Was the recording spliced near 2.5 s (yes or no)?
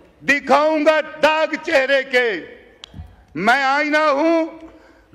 no